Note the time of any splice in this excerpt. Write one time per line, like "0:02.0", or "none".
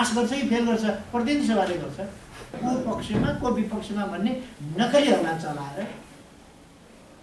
0:02.5